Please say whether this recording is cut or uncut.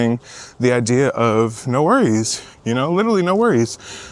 uncut